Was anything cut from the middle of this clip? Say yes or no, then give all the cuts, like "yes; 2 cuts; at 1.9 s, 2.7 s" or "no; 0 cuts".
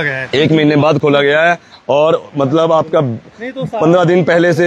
no; 0 cuts